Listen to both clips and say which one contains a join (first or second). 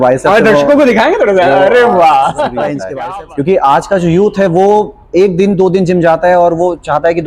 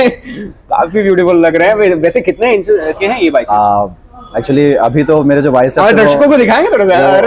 first